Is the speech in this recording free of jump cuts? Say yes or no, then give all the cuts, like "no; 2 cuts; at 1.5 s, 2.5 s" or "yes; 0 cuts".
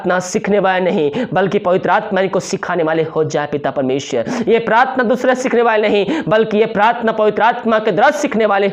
yes; 0 cuts